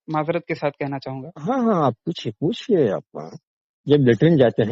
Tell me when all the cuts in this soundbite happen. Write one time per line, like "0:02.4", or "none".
none